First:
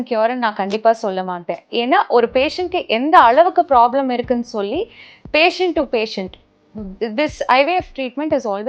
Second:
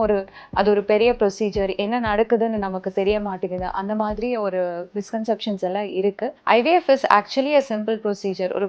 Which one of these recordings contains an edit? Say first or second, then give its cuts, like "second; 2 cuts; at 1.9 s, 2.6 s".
second; 1 cut; at 6.4 s